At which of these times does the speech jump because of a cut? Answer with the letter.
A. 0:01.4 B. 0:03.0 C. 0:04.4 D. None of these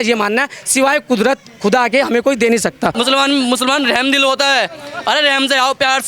B